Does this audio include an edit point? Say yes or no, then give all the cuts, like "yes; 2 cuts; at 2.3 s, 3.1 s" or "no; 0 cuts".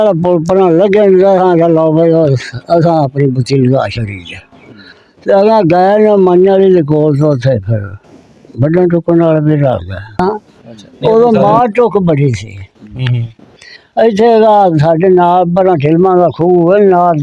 yes; 1 cut; at 10.2 s